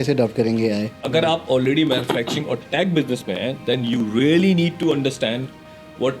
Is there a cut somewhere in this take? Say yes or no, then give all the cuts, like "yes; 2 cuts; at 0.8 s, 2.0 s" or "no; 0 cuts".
yes; 1 cut; at 1.0 s